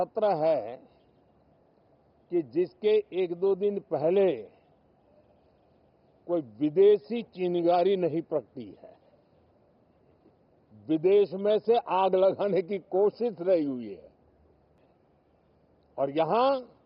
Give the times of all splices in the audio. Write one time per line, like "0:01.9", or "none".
0:14.8